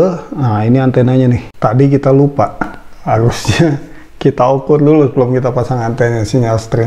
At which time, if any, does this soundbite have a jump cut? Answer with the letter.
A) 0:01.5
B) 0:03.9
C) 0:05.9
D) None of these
A